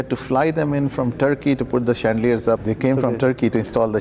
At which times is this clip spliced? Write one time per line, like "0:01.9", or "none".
0:02.6